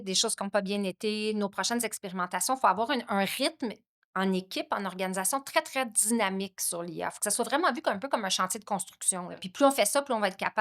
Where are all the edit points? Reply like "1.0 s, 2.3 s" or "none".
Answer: 9.5 s